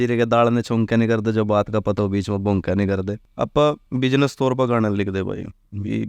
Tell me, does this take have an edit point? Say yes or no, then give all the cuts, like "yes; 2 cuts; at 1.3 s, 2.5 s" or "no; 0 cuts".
yes; 1 cut; at 3.2 s